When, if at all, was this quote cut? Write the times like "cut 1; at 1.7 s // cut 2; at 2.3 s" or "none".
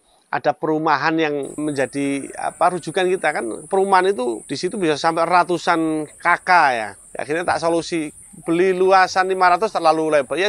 cut 1; at 7.0 s